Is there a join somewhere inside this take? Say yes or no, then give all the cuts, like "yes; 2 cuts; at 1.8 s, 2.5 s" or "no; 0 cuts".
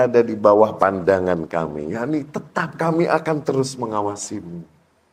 no; 0 cuts